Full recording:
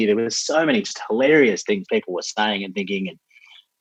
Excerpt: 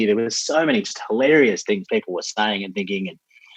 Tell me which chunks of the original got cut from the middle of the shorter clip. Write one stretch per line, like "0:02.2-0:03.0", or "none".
none

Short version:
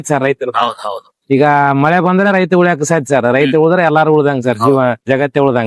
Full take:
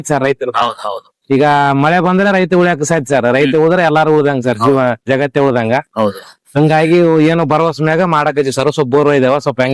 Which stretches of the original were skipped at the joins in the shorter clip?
none

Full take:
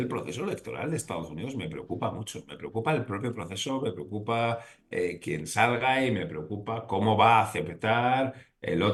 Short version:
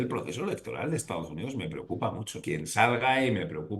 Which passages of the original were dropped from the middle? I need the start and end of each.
0:02.4-0:05.2

